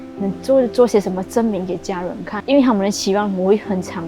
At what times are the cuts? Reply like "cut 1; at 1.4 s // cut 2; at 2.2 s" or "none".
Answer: cut 1; at 2.3 s